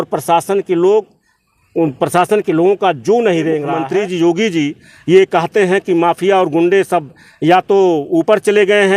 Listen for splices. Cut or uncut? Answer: cut